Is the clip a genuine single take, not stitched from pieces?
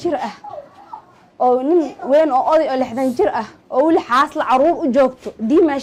yes; 0 cuts

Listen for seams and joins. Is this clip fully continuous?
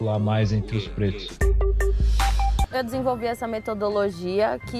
no; 2 cuts; at 1.4 s, 2.7 s

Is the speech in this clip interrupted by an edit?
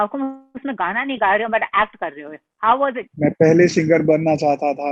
yes; 1 cut; at 3.1 s

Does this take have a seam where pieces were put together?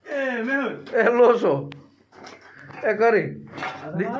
no; 0 cuts

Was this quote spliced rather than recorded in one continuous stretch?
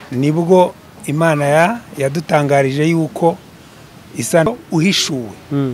yes; 1 cut; at 4.5 s

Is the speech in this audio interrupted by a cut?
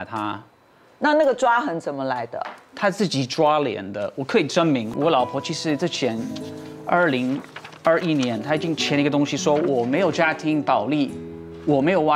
yes; 1 cut; at 4.9 s

